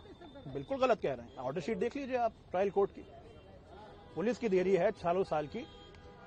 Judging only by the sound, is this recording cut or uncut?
uncut